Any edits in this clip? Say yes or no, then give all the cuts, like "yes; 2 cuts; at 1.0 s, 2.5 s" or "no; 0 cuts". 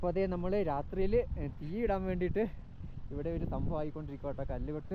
no; 0 cuts